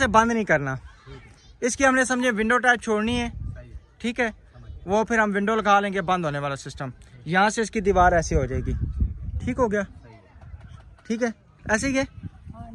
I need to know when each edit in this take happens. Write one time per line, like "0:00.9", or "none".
none